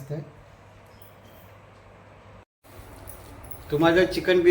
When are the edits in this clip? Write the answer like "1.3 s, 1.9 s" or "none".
2.5 s